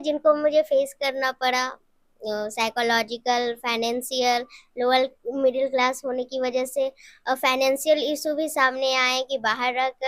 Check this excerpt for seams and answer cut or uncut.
uncut